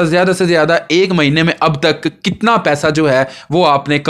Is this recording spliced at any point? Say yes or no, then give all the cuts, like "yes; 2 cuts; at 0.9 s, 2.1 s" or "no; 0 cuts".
no; 0 cuts